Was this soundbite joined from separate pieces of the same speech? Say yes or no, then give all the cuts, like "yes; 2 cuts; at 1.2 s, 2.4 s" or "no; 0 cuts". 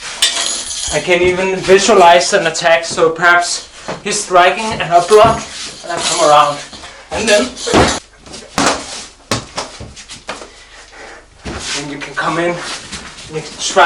yes; 1 cut; at 8.0 s